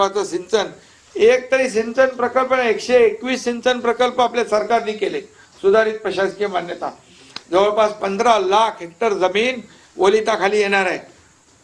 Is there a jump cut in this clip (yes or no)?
no